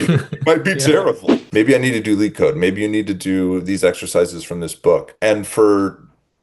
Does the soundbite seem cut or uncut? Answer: cut